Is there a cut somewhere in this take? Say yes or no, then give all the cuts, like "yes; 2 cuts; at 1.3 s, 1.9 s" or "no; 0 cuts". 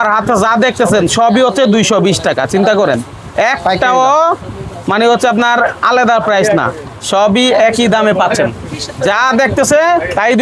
no; 0 cuts